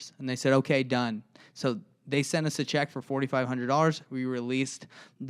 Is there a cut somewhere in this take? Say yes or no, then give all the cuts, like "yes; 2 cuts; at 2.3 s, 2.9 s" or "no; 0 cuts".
no; 0 cuts